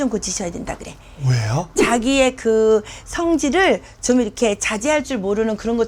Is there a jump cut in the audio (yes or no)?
no